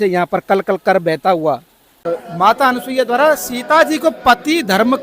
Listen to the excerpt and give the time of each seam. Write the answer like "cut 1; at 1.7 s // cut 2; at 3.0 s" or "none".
cut 1; at 2.0 s